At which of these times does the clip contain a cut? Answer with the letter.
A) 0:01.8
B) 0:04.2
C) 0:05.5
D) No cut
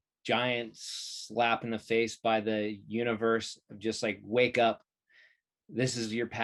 D